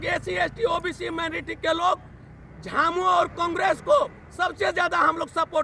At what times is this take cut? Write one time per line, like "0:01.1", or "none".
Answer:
none